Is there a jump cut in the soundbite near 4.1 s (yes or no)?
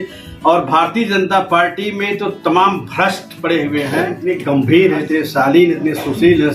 yes